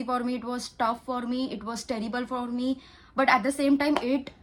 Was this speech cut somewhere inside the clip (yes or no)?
no